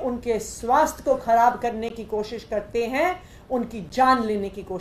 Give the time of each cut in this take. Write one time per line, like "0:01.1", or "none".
none